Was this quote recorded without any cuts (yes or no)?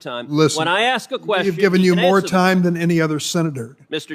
yes